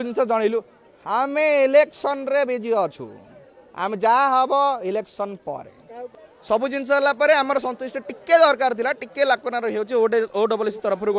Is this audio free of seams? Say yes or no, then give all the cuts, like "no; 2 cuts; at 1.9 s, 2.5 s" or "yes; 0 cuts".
no; 1 cut; at 6.1 s